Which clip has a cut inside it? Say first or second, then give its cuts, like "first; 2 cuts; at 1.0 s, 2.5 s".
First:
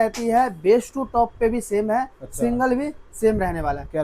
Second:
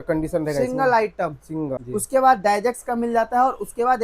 second; 1 cut; at 1.8 s